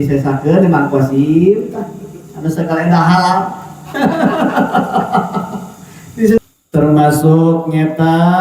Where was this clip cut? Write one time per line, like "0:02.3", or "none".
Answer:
0:06.4